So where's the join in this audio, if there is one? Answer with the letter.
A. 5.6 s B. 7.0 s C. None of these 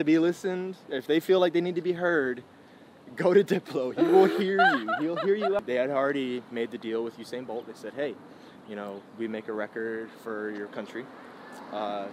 A